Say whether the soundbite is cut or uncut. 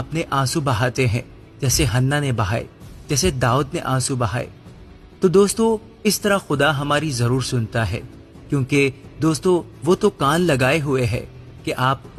uncut